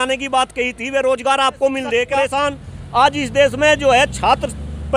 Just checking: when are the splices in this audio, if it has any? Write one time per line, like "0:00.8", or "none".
0:02.3